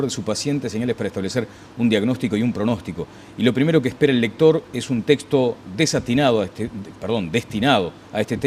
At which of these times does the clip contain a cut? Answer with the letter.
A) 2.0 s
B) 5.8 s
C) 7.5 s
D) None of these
C